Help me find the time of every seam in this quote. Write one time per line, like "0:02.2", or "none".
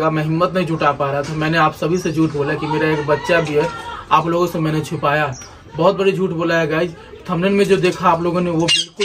none